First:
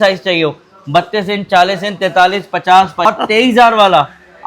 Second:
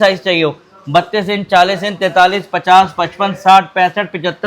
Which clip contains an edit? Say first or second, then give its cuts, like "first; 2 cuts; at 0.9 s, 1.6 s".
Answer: first; 1 cut; at 3.1 s